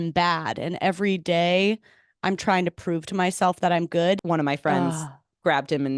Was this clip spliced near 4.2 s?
yes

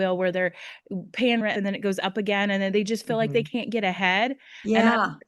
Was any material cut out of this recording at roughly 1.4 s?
yes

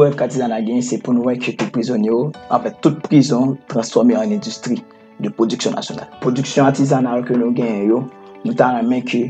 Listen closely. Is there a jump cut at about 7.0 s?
no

